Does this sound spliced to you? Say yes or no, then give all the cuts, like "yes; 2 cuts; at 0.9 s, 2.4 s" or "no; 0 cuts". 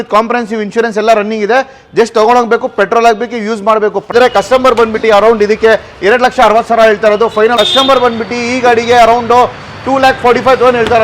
yes; 2 cuts; at 4.1 s, 7.5 s